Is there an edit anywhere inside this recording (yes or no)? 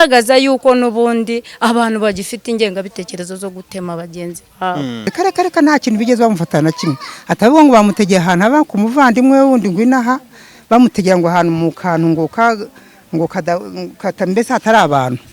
yes